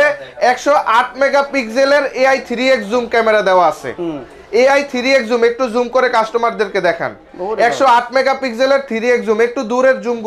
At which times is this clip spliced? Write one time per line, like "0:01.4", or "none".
none